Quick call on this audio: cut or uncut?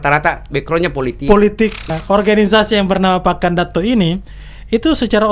cut